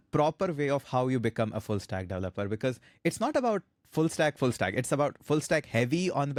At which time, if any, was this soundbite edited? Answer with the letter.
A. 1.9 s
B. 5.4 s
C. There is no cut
C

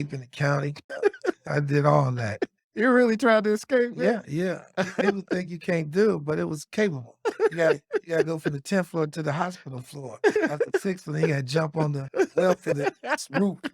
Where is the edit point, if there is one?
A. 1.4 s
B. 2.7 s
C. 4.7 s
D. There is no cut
A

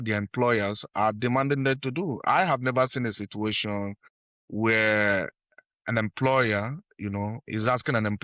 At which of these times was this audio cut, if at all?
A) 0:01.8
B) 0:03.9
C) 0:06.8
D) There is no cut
D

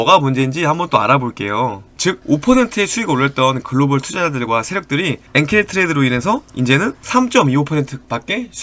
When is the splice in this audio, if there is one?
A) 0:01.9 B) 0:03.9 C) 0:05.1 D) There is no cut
A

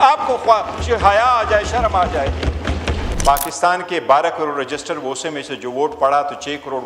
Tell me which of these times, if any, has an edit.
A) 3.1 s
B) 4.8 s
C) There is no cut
A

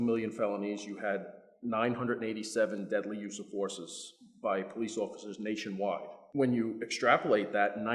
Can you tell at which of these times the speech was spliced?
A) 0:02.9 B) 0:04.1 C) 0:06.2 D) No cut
C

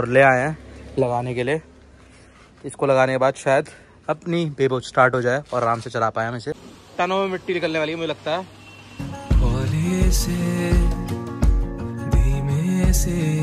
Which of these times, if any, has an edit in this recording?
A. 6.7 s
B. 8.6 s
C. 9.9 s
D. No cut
A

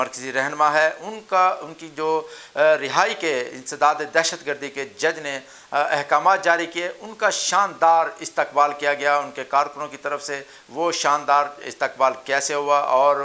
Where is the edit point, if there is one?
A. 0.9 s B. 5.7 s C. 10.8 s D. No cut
D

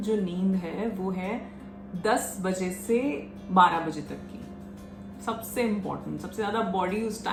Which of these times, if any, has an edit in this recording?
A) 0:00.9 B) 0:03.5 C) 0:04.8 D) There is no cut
D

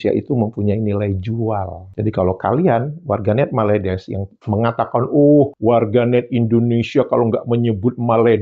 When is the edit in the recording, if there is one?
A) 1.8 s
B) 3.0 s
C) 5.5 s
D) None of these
A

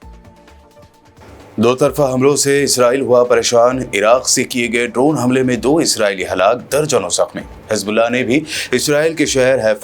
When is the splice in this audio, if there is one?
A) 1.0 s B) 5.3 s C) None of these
A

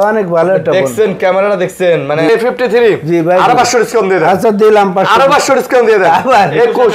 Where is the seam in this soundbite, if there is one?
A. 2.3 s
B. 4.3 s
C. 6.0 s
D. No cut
A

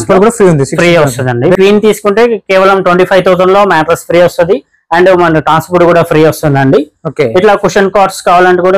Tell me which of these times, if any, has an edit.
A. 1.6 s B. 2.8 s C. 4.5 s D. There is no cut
A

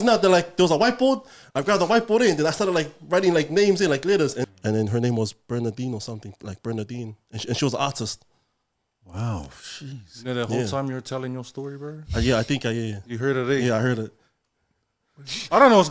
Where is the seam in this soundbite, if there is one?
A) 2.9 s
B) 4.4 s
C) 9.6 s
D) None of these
B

